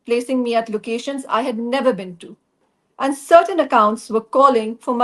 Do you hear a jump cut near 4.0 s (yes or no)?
no